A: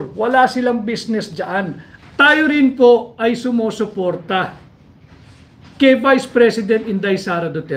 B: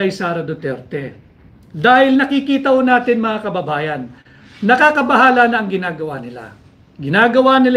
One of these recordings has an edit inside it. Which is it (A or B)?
A